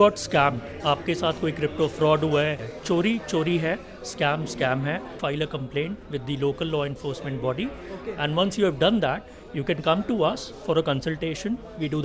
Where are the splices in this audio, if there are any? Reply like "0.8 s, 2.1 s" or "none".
2.7 s, 5.2 s

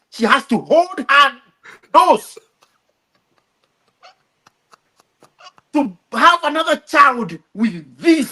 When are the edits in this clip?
none

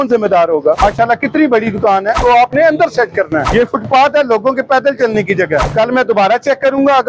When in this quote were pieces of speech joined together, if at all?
0.8 s, 2.2 s, 3.5 s, 5.7 s

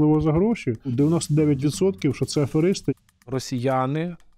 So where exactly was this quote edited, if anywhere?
1.2 s, 3.1 s

